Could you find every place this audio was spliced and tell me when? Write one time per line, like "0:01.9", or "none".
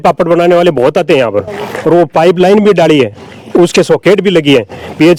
none